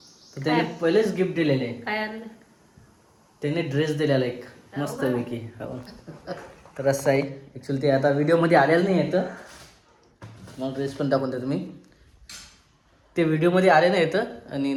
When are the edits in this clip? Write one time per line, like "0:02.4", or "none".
none